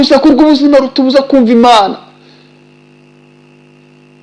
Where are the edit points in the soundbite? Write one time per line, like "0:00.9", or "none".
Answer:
none